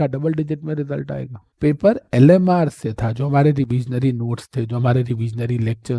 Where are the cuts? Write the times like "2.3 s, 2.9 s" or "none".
1.4 s